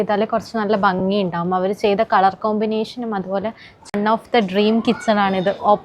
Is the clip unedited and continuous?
no; 1 cut; at 3.7 s

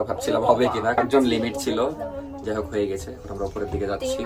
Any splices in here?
no; 0 cuts

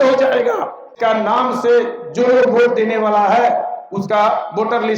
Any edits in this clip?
yes; 1 cut; at 0.9 s

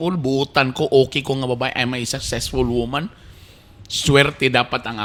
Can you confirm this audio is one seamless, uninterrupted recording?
yes; 0 cuts

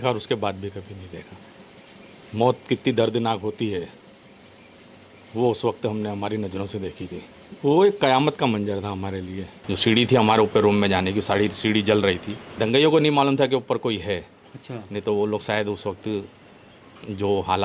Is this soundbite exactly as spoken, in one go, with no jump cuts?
no; 3 cuts; at 7.4 s, 9.5 s, 12.4 s

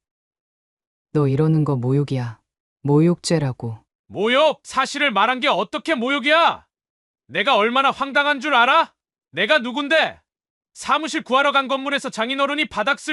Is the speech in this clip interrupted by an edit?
no; 0 cuts

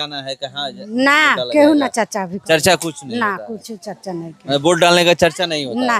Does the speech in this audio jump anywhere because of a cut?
no; 0 cuts

